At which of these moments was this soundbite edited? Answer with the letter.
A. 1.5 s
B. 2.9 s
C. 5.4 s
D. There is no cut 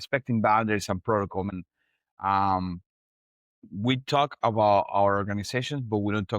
A